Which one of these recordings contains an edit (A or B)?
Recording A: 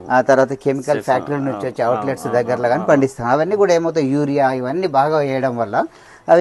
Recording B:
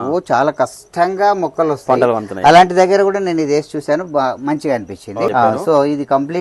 B